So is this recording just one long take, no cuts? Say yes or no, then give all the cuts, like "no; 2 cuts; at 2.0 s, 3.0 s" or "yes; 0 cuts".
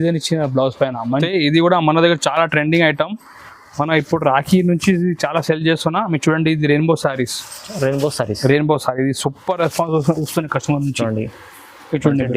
no; 1 cut; at 1.3 s